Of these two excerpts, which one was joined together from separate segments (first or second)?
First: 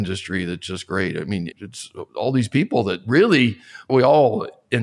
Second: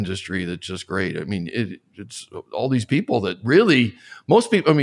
first